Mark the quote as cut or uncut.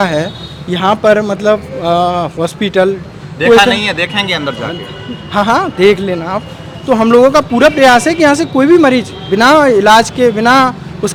uncut